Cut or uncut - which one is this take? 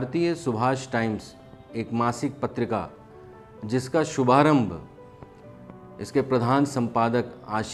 uncut